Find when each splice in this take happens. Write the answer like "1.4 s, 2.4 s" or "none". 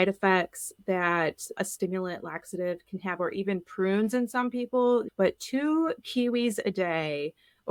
none